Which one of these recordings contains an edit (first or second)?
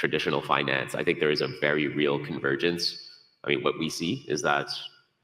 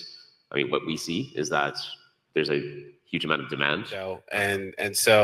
second